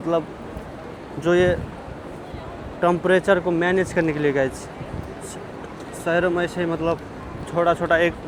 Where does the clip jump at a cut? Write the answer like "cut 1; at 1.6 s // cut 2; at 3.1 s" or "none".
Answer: none